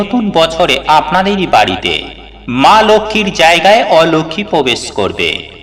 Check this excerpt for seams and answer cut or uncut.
uncut